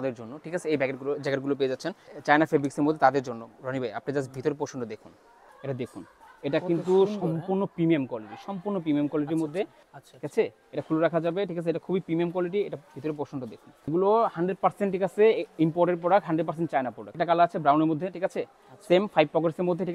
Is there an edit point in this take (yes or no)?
yes